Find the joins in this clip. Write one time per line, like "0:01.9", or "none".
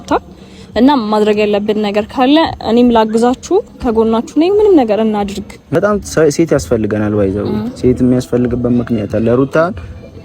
0:05.7